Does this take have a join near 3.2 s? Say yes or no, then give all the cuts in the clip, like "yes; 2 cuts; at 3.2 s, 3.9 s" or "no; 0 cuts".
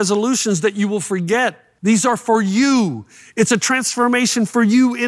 no; 1 cut; at 1.7 s